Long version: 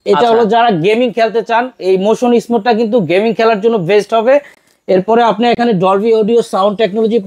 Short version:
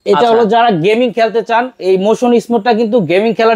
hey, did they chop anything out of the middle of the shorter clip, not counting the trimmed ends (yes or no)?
no